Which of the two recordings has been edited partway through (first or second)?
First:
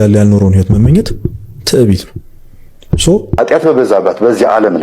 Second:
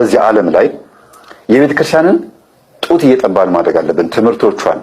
first